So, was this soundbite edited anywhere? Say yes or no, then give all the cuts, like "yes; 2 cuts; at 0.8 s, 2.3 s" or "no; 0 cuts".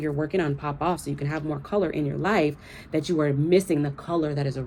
no; 0 cuts